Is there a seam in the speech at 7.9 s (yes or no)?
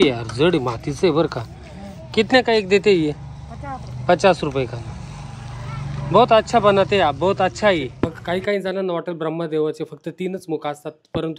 yes